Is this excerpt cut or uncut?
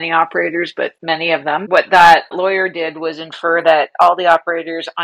cut